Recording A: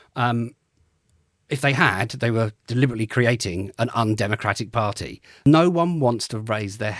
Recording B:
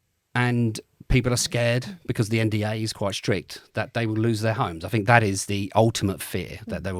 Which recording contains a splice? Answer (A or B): A